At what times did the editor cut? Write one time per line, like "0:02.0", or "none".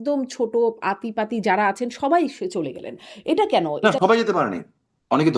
0:03.8